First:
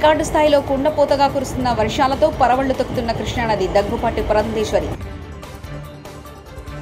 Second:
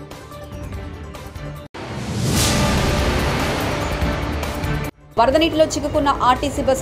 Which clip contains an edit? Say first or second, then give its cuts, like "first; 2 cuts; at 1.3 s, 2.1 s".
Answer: second; 2 cuts; at 1.2 s, 5.0 s